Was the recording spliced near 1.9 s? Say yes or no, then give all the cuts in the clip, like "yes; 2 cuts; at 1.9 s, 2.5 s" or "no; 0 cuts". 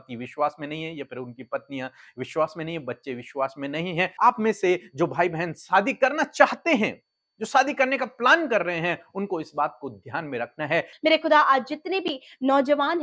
no; 2 cuts; at 4.1 s, 10.9 s